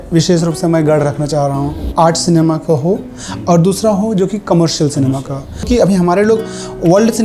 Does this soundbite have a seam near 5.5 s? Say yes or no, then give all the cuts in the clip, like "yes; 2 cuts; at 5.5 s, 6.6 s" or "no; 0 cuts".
yes; 2 cuts; at 1.8 s, 5.5 s